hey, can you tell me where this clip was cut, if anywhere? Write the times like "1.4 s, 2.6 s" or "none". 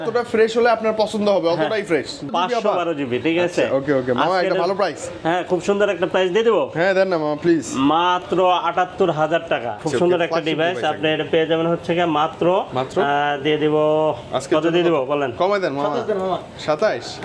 2.3 s, 9.8 s

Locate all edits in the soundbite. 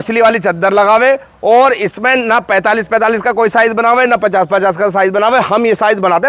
none

